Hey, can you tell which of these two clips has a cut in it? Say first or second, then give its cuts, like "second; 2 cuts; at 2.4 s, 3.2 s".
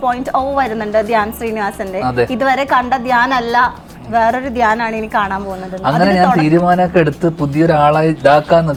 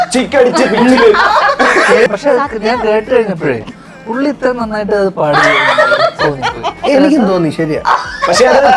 second; 1 cut; at 2.1 s